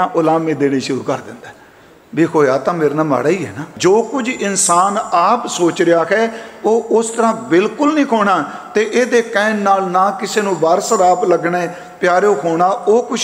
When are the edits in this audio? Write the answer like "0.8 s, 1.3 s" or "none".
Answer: 3.6 s